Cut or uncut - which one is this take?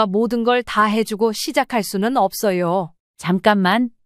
cut